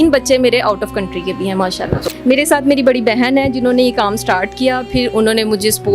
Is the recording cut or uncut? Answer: cut